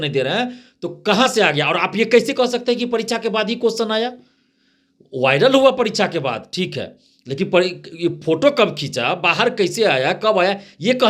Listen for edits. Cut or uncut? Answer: uncut